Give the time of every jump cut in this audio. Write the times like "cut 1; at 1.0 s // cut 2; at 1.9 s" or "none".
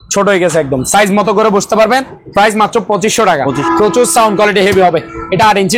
cut 1; at 2.1 s // cut 2; at 3.6 s